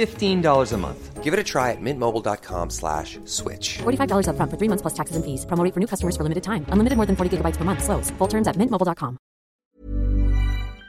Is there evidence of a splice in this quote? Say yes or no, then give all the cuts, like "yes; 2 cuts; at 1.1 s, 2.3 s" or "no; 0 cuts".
yes; 1 cut; at 9.6 s